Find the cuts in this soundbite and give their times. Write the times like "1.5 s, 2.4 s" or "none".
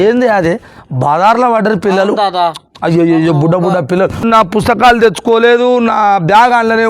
4.2 s

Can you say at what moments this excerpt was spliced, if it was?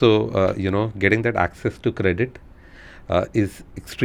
none

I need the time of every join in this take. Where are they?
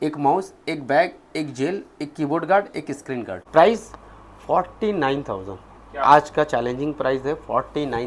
3.3 s

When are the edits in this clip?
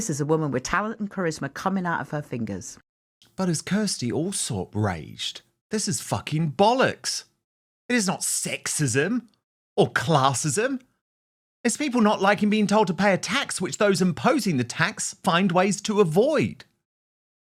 none

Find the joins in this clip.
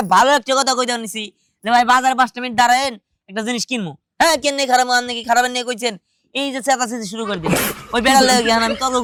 none

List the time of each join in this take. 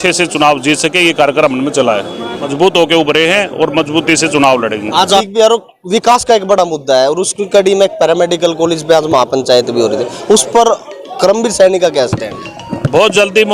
2.5 s, 5.3 s

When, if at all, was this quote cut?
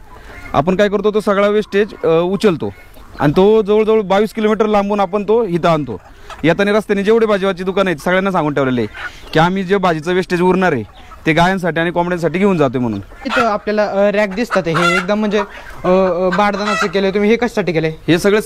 13.3 s

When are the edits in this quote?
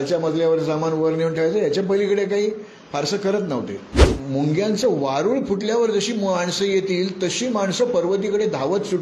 4.1 s

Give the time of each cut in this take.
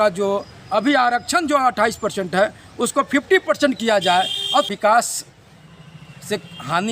4.7 s

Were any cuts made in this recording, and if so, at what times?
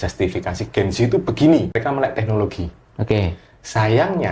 1.8 s

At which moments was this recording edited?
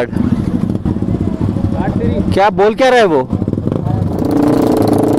none

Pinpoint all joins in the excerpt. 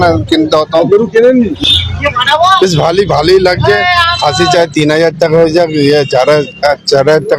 1.5 s

